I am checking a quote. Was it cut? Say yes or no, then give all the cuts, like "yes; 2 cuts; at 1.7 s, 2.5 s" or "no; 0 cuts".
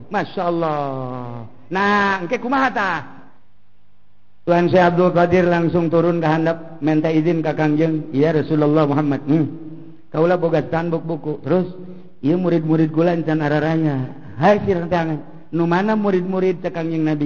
no; 0 cuts